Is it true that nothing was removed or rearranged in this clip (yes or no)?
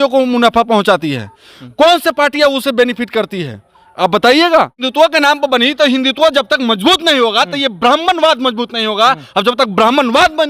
no